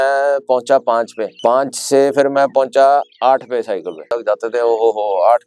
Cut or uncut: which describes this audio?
cut